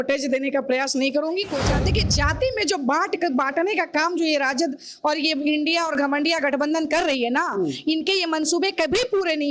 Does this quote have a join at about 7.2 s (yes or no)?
no